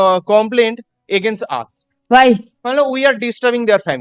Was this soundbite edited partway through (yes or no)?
yes